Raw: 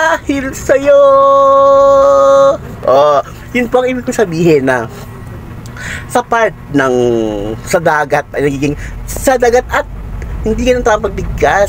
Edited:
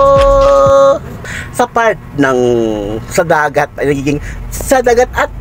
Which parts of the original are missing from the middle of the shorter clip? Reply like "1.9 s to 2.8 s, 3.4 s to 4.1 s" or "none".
2.7 s to 5.7 s